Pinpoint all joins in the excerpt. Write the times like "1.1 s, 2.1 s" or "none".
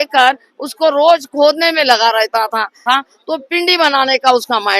2.8 s